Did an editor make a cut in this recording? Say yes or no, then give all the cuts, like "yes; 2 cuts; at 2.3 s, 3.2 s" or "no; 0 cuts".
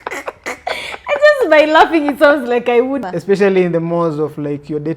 yes; 1 cut; at 3.1 s